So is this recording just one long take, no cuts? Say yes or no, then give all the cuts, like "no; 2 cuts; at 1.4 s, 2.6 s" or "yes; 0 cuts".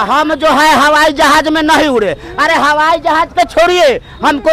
yes; 0 cuts